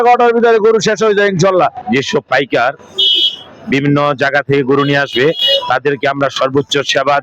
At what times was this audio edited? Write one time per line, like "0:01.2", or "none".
0:01.7